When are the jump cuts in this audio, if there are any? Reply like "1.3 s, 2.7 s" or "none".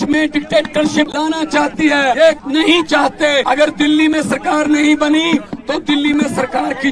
1.1 s, 2.3 s, 3.4 s